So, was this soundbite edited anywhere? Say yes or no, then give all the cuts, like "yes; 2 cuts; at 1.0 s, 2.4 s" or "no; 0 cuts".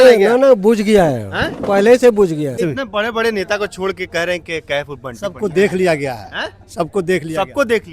yes; 1 cut; at 2.6 s